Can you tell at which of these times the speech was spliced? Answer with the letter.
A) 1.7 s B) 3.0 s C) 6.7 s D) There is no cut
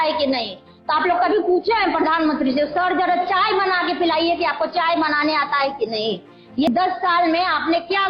C